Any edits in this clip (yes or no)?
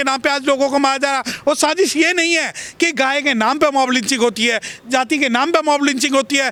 no